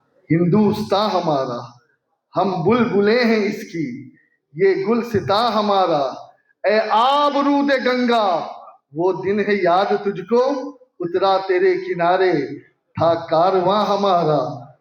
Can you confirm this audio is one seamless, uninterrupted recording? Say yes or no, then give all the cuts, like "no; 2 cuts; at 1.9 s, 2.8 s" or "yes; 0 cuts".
yes; 0 cuts